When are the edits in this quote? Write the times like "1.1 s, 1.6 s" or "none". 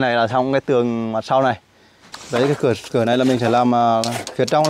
2.1 s